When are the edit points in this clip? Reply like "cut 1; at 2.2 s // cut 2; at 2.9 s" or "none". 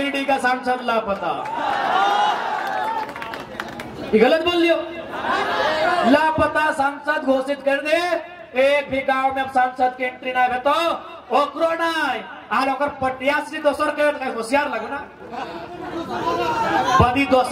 none